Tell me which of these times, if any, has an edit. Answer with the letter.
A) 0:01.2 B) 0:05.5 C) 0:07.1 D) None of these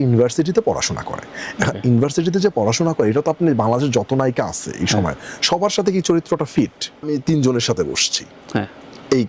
C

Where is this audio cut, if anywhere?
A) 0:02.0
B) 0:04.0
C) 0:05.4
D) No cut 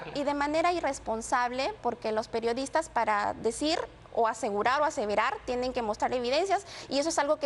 D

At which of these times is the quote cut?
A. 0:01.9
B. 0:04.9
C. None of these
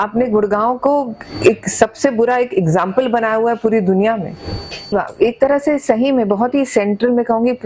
B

